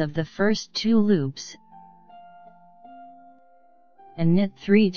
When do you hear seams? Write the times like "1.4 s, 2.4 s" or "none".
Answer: 1.5 s, 4.0 s